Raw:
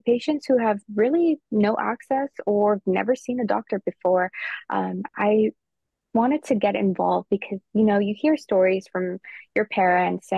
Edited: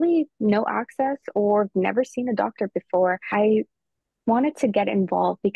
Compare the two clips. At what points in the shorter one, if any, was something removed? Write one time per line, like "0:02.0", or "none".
0:03.2